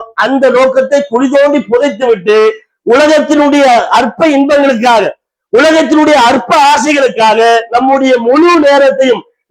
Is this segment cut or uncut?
uncut